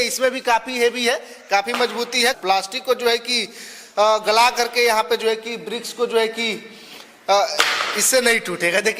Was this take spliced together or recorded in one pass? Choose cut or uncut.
cut